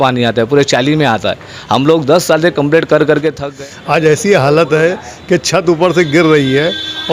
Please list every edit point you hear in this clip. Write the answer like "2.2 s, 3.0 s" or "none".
3.4 s